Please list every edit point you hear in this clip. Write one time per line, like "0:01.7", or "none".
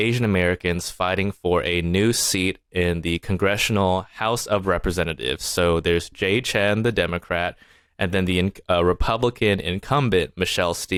none